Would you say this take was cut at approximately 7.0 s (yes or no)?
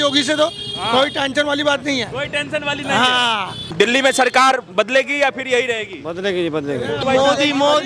yes